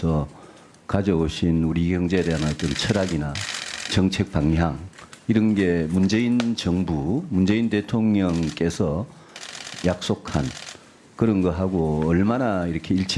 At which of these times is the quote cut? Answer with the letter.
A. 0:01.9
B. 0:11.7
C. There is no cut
B